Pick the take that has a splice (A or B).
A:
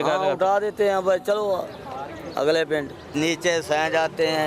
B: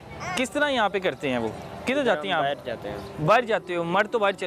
A